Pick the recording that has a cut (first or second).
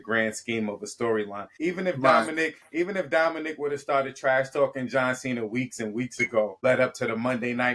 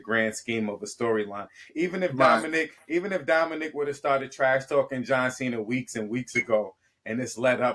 first